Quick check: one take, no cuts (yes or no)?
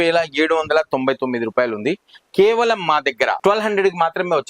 no